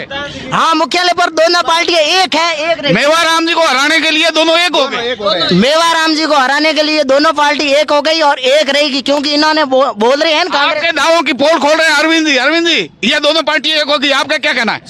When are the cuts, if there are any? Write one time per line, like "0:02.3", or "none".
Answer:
none